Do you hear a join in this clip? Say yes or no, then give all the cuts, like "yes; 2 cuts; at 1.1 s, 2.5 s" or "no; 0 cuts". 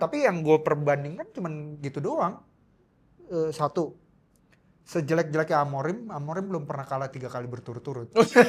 no; 0 cuts